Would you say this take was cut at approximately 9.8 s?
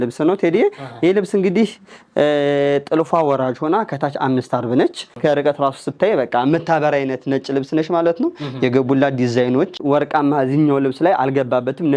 yes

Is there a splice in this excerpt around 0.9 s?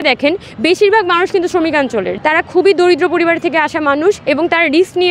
no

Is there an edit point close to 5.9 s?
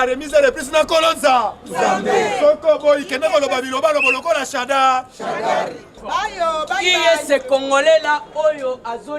yes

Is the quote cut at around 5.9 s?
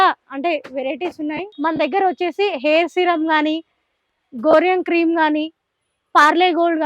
no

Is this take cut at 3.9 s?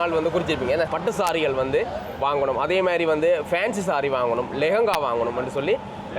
no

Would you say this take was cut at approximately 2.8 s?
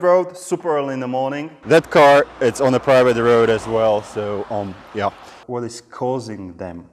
no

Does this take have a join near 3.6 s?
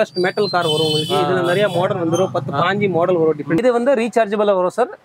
yes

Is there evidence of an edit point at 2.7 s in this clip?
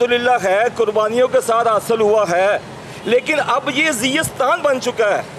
no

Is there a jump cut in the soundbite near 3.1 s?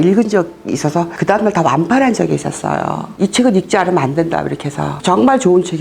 yes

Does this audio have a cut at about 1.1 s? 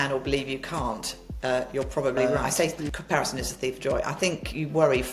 no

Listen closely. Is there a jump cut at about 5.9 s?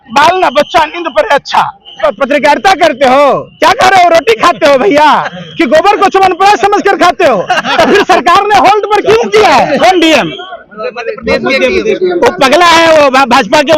no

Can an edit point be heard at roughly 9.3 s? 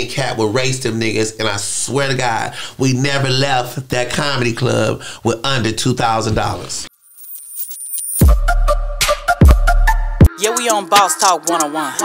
no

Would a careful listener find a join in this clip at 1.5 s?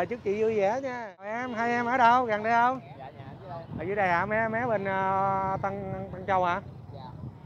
yes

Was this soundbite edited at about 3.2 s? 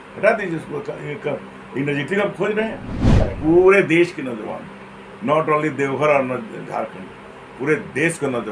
yes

